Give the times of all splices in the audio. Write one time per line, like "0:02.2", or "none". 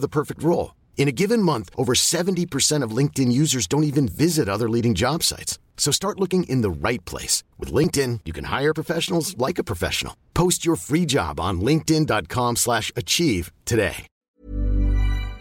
0:14.1